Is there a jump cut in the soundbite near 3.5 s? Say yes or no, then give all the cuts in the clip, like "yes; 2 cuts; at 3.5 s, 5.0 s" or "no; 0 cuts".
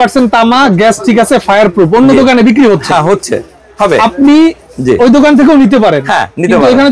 no; 0 cuts